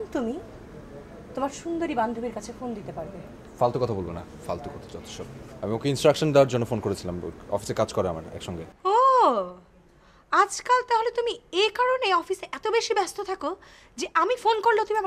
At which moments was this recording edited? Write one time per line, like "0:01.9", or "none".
none